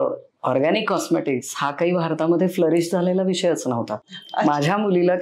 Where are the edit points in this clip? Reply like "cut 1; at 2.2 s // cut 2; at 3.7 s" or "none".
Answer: cut 1; at 3.9 s